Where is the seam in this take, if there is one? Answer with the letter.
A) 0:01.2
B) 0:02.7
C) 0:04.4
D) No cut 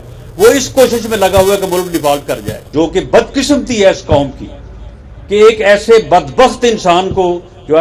B